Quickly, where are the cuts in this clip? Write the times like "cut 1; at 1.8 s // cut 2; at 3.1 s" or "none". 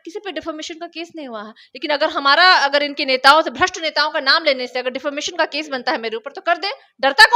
none